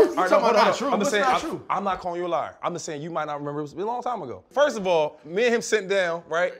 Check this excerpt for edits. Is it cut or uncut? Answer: cut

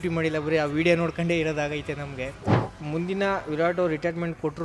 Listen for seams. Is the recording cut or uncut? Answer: cut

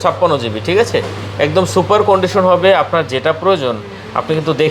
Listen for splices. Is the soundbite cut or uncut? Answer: uncut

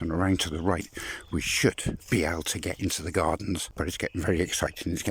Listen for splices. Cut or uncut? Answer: cut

